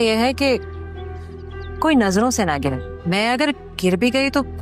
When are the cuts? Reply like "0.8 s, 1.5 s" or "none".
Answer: 2.9 s